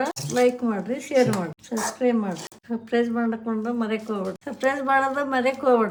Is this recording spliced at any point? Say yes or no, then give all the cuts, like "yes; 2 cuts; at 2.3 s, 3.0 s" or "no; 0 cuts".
no; 0 cuts